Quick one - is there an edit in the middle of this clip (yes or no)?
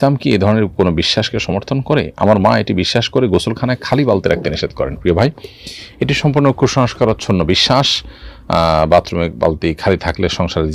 no